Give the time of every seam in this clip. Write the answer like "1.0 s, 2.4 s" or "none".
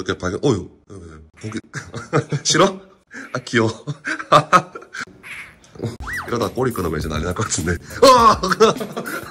6.0 s